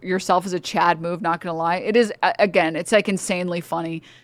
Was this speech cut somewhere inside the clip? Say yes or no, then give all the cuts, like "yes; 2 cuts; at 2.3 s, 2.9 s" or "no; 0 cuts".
no; 0 cuts